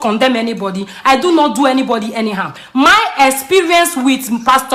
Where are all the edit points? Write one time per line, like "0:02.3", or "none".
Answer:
none